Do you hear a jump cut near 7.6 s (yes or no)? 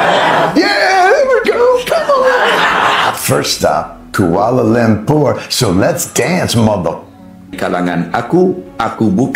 yes